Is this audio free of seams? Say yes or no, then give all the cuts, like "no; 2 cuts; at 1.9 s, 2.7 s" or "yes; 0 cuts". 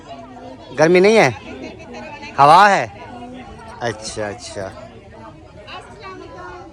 yes; 0 cuts